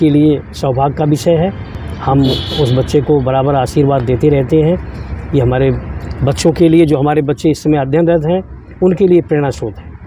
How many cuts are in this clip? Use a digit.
0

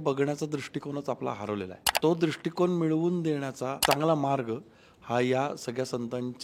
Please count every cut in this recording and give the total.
2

